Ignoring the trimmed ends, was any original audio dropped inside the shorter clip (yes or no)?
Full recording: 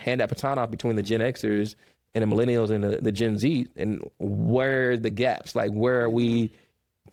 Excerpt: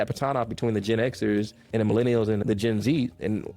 yes